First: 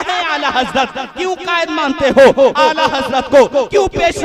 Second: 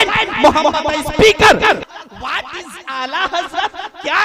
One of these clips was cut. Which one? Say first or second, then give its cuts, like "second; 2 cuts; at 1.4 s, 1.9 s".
second; 1 cut; at 1.8 s